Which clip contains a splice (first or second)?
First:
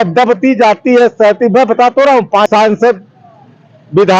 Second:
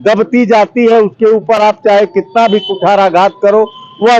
first